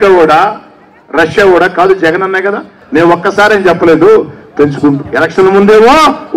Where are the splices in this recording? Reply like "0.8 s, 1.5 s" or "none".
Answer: 2.7 s